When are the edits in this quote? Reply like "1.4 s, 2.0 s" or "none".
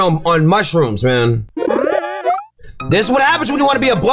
1.5 s

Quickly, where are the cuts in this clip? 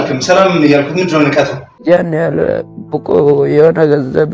1.7 s

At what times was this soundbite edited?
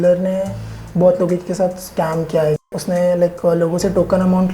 2.8 s

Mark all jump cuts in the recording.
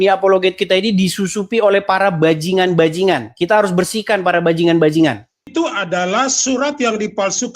5.4 s

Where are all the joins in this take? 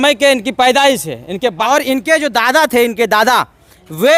1.6 s

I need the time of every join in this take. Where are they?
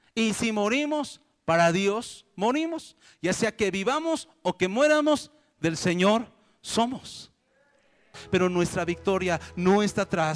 8.2 s

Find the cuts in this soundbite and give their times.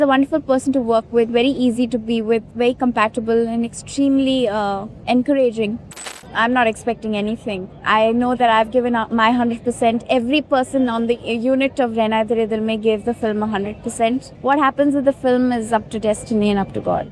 2.5 s, 4.9 s, 5.9 s, 14.3 s

